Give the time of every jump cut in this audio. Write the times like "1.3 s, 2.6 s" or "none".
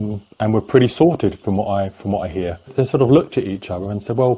2.7 s